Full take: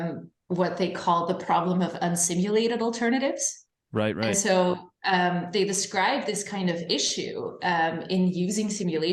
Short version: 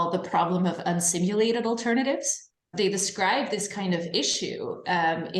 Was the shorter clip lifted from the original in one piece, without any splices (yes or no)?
no